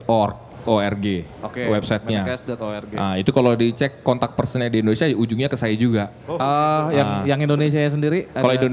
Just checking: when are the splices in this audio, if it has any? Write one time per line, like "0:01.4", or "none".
none